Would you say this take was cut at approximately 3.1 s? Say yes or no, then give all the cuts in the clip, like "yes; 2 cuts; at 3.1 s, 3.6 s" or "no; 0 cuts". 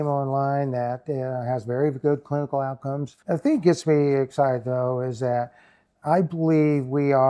yes; 1 cut; at 3.1 s